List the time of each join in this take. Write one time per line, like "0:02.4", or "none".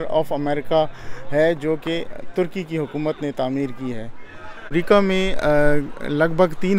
0:04.7